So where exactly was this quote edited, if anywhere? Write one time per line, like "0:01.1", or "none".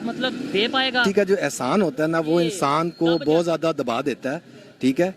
0:01.0